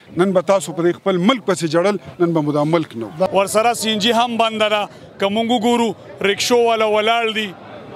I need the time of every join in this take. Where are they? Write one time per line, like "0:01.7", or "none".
0:03.3